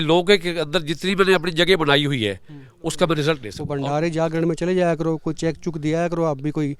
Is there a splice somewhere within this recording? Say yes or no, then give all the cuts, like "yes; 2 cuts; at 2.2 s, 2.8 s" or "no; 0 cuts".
yes; 1 cut; at 3.6 s